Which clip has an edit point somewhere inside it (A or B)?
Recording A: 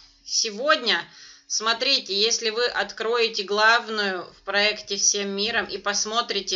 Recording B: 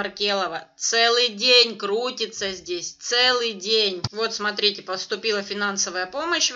B